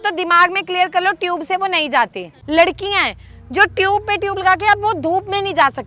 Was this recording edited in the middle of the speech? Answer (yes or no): yes